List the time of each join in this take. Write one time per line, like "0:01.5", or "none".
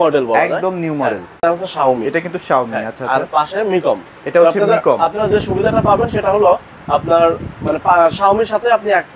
0:01.4